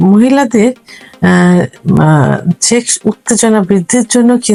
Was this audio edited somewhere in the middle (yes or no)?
no